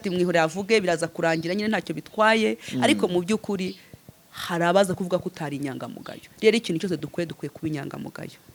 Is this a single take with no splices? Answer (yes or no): yes